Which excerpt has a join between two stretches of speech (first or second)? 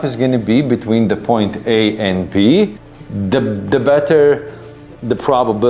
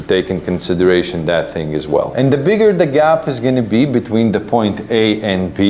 second